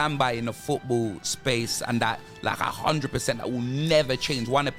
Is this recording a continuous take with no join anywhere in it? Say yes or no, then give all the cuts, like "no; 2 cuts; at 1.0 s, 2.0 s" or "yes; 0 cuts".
yes; 0 cuts